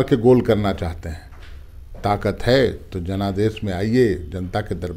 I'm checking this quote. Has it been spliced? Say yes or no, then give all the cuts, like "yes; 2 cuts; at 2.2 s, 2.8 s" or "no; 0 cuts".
no; 0 cuts